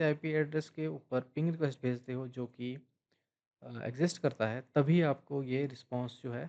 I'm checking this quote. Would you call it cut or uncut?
uncut